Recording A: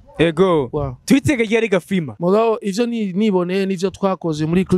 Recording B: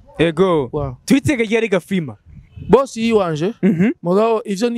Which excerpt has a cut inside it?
A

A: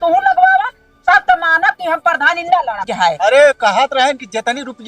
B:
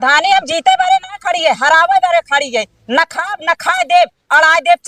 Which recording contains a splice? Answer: A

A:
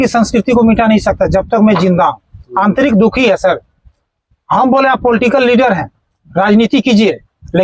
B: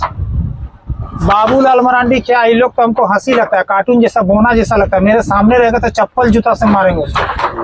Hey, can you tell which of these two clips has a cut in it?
B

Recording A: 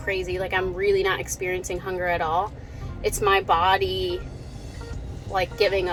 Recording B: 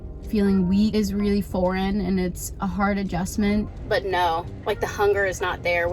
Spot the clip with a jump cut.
B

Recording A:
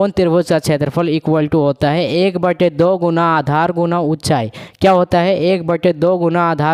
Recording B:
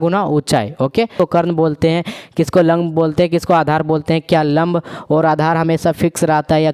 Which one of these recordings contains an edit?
B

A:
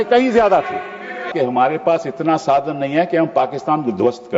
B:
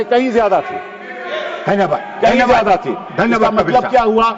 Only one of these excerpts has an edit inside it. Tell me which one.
A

